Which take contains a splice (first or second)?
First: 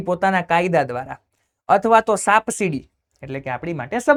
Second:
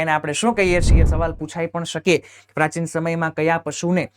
second